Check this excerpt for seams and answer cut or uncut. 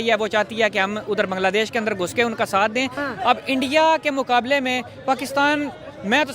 cut